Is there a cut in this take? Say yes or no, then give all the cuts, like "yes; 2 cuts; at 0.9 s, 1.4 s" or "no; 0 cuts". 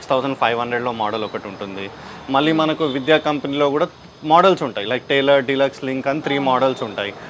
no; 0 cuts